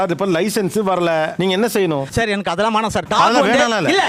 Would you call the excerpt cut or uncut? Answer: uncut